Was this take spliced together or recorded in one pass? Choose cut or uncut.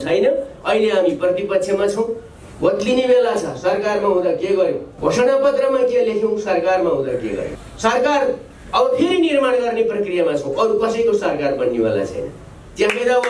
cut